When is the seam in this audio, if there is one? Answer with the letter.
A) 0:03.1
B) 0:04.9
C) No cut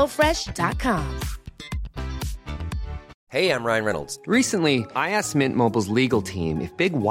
A